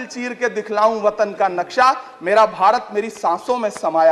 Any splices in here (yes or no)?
no